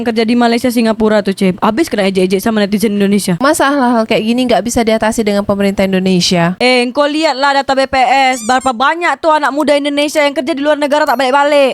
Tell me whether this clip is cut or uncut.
cut